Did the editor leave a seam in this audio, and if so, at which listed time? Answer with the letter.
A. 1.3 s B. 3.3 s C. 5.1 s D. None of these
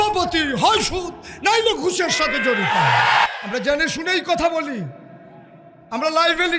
B